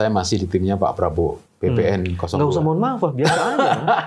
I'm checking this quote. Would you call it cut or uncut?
uncut